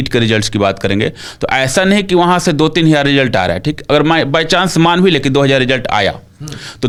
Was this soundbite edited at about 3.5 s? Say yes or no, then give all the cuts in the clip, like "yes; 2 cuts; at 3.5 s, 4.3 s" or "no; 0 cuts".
no; 0 cuts